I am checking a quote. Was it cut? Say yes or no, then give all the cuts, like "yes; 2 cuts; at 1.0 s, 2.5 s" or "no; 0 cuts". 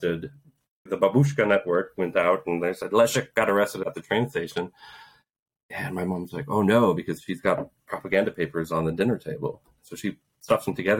no; 0 cuts